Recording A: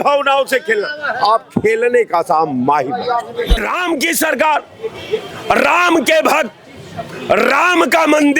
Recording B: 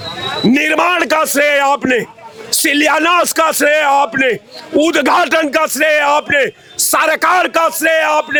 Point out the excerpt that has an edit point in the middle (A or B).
A